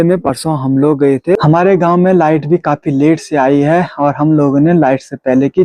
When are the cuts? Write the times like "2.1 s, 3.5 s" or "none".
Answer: 1.4 s